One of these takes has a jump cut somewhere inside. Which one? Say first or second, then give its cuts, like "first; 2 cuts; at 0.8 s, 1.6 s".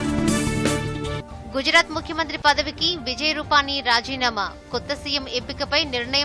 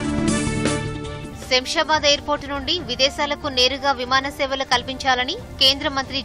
second; 1 cut; at 0.9 s